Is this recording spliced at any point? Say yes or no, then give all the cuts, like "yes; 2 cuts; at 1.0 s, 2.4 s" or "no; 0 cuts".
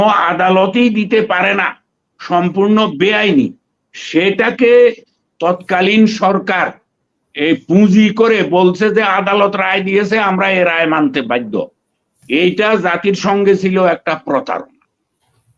no; 0 cuts